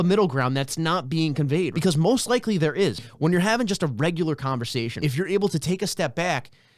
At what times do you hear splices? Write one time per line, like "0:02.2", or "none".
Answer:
0:01.7
0:03.0
0:04.9